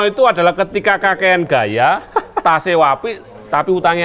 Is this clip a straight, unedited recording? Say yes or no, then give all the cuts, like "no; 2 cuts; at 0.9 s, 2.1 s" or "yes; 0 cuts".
yes; 0 cuts